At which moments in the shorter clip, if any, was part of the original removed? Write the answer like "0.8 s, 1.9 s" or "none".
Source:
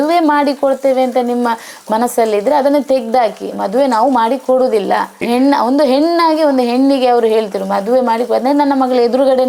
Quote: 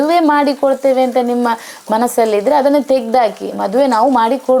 none